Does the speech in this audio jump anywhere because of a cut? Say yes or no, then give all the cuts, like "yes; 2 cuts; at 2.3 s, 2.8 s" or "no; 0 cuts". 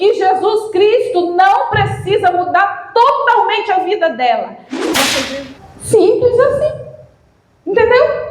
yes; 1 cut; at 5.4 s